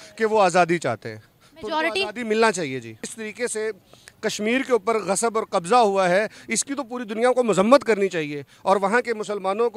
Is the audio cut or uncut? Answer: cut